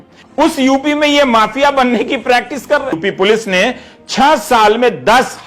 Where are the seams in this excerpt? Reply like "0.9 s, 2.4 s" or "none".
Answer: 3.0 s